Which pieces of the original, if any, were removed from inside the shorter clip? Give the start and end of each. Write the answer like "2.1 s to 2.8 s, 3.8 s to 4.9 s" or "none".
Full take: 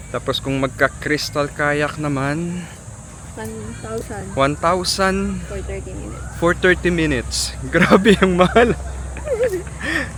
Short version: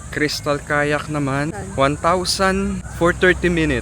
2.4 s to 4.1 s, 5.4 s to 6.3 s